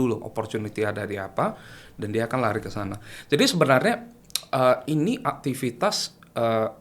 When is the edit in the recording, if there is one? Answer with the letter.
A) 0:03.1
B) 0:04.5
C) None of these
C